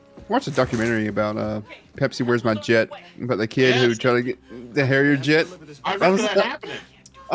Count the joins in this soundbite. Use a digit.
0